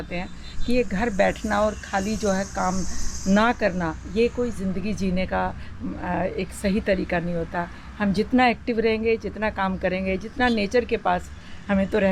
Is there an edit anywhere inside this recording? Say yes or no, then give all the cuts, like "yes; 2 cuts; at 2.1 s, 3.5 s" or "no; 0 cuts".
no; 0 cuts